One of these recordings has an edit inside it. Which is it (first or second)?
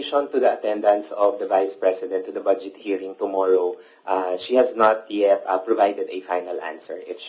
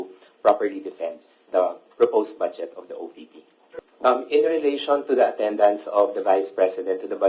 second